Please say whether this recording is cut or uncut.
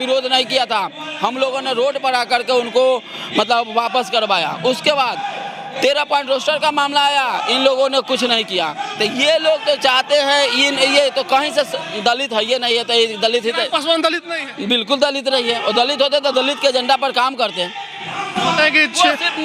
uncut